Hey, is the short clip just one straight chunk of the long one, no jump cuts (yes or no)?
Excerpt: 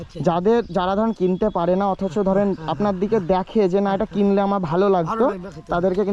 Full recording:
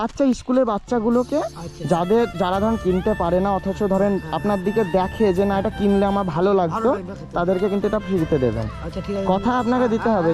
yes